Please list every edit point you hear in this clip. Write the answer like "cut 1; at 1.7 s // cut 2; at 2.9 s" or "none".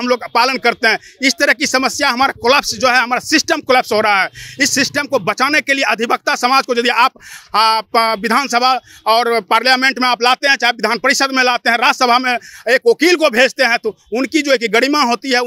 none